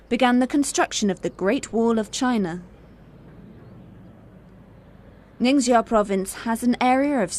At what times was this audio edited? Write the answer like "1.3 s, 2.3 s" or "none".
3.4 s